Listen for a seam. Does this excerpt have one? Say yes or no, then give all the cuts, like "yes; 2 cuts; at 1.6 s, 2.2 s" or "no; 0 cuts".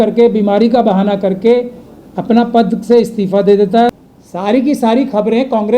yes; 1 cut; at 3.9 s